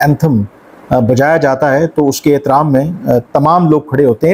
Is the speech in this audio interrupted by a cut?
no; 0 cuts

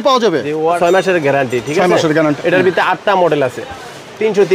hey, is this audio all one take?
no; 2 cuts; at 0.8 s, 2.4 s

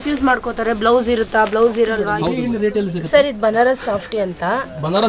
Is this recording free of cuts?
no; 1 cut; at 2.4 s

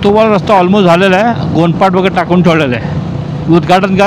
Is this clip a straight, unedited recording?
yes; 0 cuts

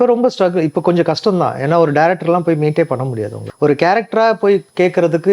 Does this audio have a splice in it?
yes; 1 cut; at 3.5 s

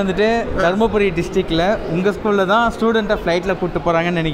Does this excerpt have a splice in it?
no; 0 cuts

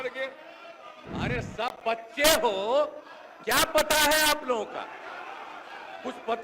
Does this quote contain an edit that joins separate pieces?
yes; 1 cut; at 0.9 s

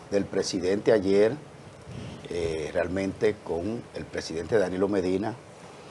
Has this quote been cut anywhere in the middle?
no; 0 cuts

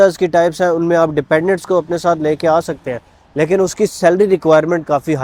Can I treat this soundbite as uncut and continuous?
yes; 0 cuts

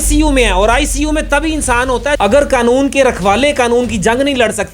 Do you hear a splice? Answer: yes; 1 cut; at 2.2 s

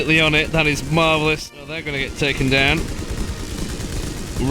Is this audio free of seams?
no; 1 cut; at 2.0 s

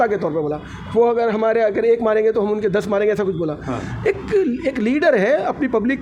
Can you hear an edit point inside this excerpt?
no; 0 cuts

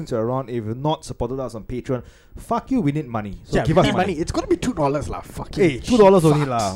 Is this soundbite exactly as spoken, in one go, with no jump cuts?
yes; 0 cuts

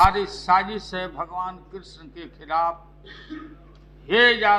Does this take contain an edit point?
no; 0 cuts

